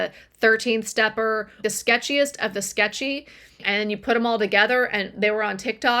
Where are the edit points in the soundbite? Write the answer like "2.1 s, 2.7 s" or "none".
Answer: 1.6 s, 3.6 s